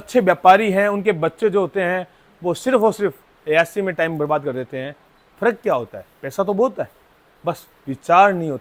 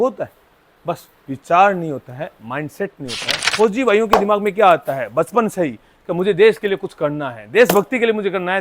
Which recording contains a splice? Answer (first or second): second